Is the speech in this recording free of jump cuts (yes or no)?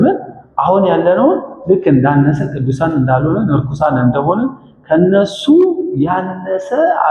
yes